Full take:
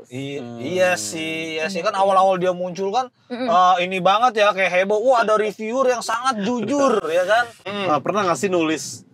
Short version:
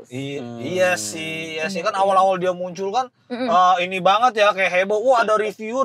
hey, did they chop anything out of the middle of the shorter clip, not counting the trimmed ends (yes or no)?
no